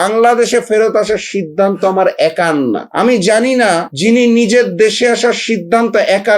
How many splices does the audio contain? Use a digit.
2